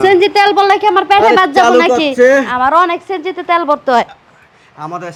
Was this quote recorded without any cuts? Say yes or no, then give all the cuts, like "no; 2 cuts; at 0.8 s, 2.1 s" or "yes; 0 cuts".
yes; 0 cuts